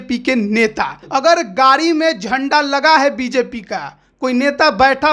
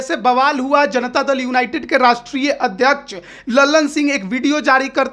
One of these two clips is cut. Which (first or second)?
first